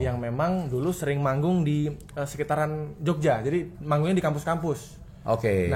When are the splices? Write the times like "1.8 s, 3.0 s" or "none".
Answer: none